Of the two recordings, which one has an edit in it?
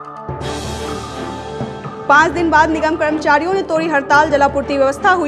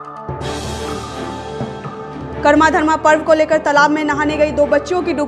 second; 1 cut; at 2.0 s

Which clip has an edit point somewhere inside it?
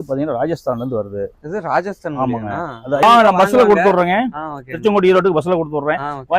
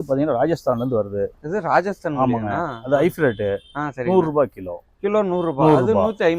first; 1 cut; at 3.0 s

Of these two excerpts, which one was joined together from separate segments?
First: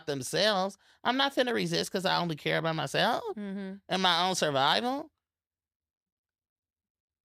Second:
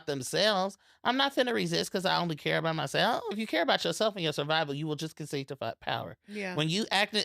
second; 1 cut; at 3.3 s

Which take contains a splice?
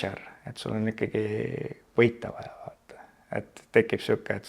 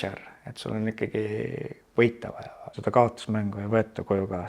second; 1 cut; at 2.7 s

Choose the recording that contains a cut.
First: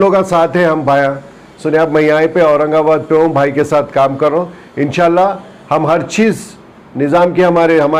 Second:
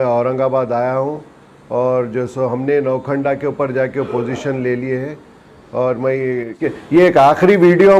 second; 1 cut; at 6.7 s

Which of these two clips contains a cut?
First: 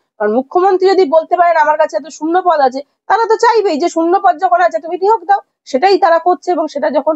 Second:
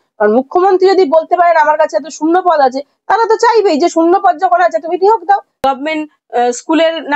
second; 1 cut; at 5.6 s

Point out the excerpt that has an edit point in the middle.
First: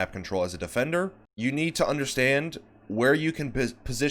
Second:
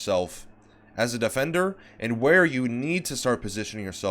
first; 1 cut; at 1.2 s

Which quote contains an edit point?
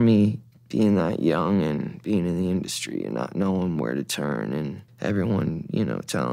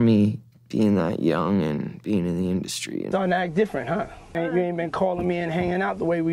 second; 2 cuts; at 3.1 s, 4.3 s

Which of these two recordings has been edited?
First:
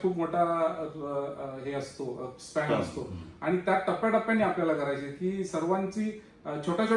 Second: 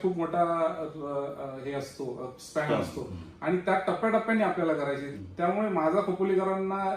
second; 1 cut; at 5.1 s

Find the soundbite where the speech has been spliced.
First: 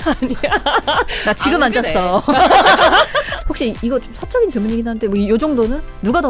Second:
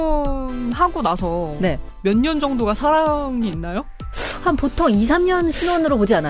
first; 2 cuts; at 1.1 s, 3.3 s

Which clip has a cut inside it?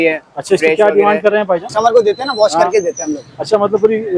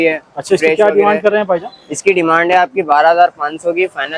first; 1 cut; at 1.7 s

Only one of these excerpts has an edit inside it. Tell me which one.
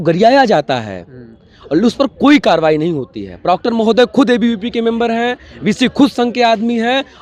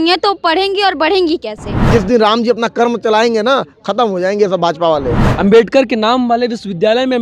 second; 2 cuts; at 1.9 s, 5.2 s

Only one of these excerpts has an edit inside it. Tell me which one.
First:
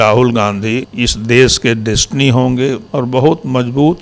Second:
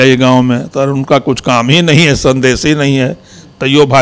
first; 2 cuts; at 0.9 s, 2.8 s

